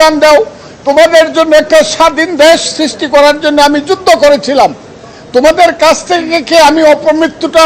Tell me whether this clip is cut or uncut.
uncut